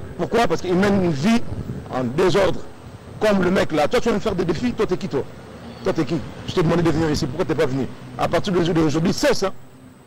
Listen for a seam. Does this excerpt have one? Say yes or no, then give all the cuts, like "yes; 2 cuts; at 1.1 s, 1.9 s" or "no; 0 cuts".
no; 0 cuts